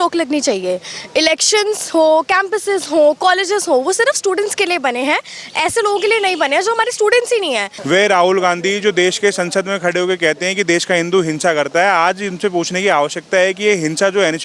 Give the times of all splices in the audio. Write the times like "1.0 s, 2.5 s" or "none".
7.7 s